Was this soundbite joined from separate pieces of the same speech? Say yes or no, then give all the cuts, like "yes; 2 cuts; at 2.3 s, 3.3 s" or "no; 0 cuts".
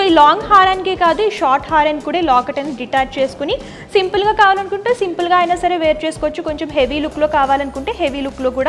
no; 0 cuts